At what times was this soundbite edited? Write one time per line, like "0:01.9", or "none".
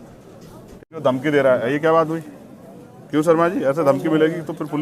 0:00.9